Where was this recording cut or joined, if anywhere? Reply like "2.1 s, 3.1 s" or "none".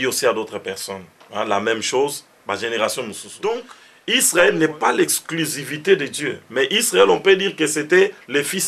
3.2 s